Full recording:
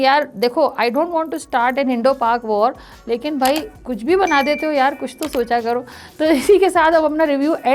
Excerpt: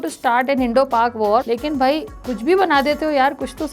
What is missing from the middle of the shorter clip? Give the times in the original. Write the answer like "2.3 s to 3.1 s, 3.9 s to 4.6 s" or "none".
2.7 s to 3.1 s